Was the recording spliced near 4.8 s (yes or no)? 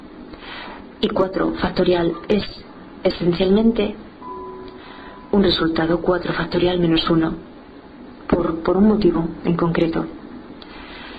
no